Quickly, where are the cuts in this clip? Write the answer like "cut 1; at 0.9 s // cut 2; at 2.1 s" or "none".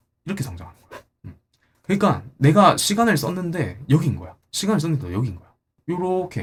none